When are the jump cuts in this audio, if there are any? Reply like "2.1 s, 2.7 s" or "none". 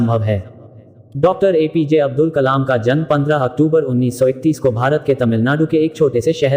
1.0 s